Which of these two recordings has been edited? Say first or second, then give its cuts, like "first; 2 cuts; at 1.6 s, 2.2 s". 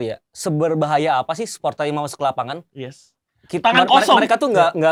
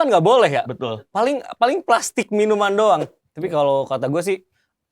second; 1 cut; at 3.1 s